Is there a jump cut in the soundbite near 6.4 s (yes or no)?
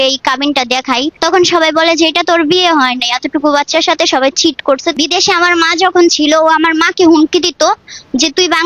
no